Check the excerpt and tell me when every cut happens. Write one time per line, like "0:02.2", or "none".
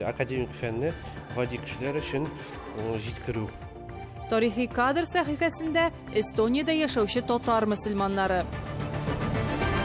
0:08.6

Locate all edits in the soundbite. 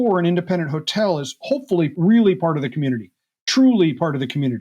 0:01.9

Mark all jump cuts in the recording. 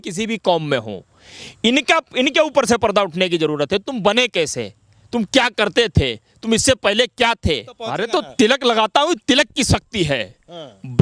0:08.0

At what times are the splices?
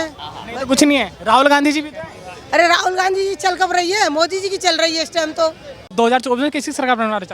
0:05.9

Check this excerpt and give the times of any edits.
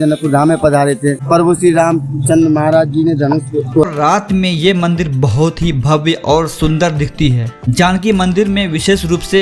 0:01.2
0:03.8
0:07.6

